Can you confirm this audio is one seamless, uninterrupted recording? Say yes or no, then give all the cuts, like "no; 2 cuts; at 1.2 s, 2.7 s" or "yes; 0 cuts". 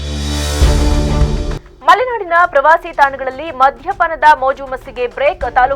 no; 1 cut; at 1.6 s